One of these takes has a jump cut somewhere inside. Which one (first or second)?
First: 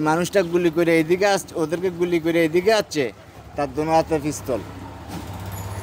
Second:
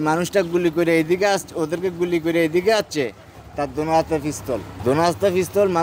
second